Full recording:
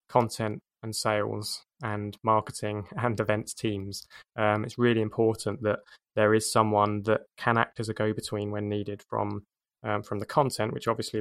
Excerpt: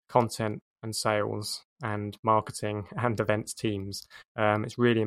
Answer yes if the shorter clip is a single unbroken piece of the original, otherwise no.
yes